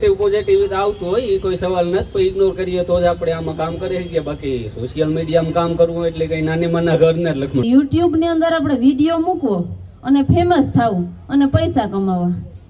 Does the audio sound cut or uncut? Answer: cut